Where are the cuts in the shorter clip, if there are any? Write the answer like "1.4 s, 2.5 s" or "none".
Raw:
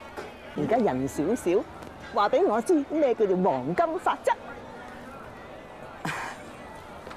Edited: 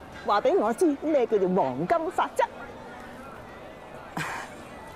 none

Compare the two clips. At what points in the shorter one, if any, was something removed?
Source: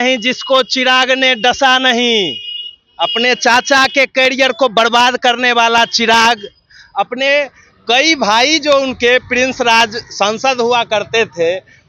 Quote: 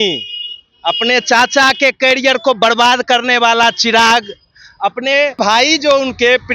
5.4 s

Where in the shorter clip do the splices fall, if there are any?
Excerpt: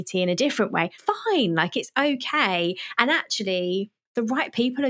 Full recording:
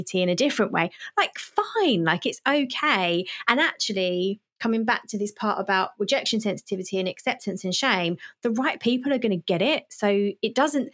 0.9 s, 4.0 s

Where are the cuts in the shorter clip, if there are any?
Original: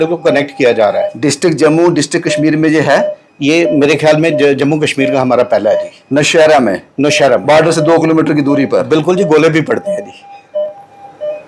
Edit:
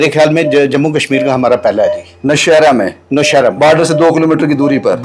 none

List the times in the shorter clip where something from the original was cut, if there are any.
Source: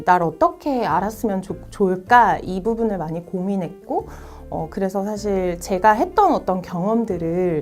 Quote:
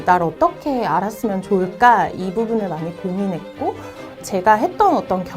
1.4 s, 4.2 s

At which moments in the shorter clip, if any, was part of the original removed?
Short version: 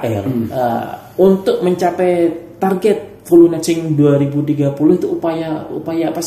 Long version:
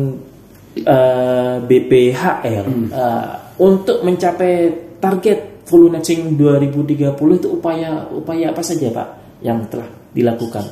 none

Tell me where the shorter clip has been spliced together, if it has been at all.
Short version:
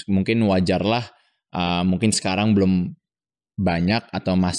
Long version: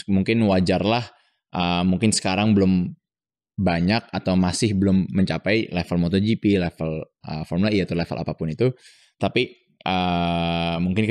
none

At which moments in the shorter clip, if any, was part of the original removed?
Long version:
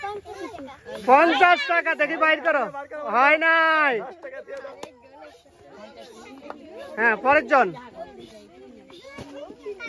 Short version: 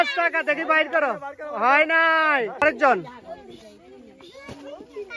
2.6 s

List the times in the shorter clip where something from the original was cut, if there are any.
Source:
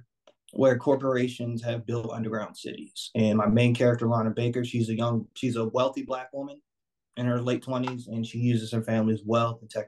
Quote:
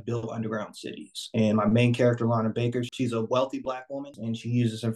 2.9 s, 4.1 s

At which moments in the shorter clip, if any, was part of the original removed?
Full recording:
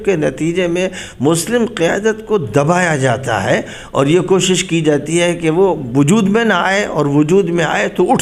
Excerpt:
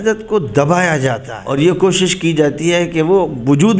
1.3 s

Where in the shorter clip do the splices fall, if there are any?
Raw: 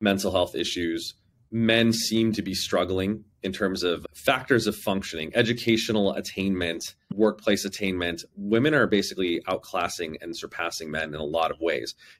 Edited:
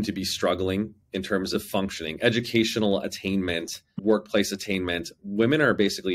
1.5 s

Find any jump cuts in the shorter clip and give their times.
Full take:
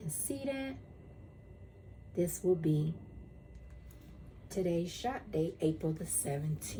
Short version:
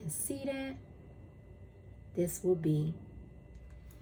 none

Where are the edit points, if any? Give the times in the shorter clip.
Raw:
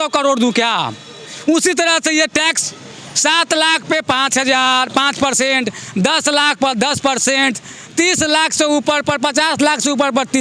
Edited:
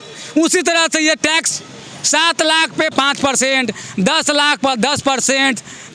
2.9 s

